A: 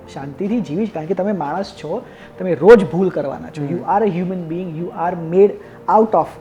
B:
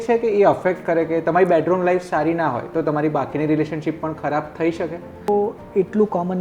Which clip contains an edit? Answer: B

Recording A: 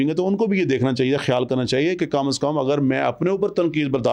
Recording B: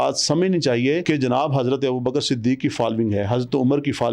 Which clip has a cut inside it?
B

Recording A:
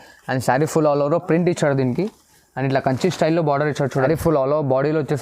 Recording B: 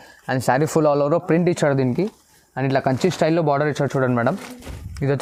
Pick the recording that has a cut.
A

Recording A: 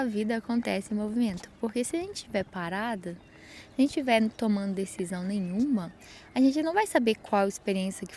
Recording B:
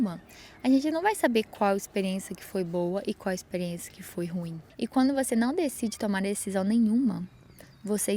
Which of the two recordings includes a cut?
B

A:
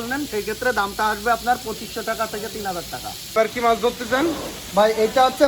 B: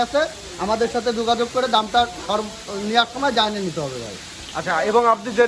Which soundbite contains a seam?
A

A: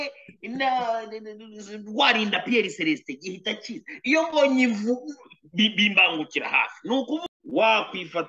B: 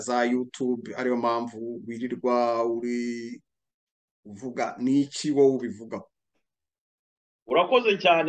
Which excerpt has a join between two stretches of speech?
A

